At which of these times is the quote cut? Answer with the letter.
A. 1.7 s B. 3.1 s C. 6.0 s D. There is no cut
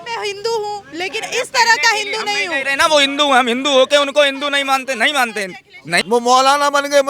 C